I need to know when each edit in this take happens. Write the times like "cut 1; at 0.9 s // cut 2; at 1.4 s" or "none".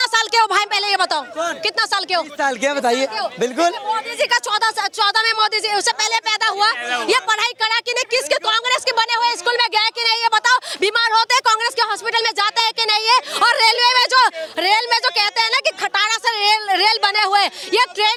none